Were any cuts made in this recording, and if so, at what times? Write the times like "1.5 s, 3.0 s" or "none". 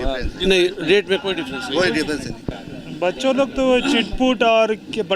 2.5 s